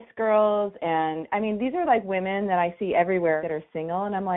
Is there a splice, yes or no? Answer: yes